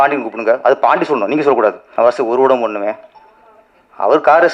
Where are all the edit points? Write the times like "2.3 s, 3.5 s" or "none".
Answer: 1.8 s